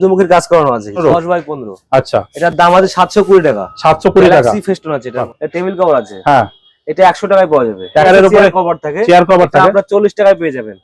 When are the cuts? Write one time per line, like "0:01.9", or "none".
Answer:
0:01.0
0:05.4
0:08.0